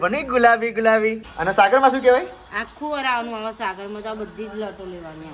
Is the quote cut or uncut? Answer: cut